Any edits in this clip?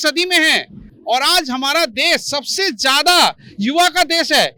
no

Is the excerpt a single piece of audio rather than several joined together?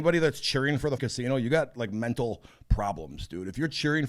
no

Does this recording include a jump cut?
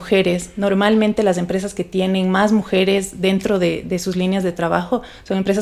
no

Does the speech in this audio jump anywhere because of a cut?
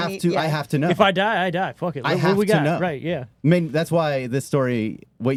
no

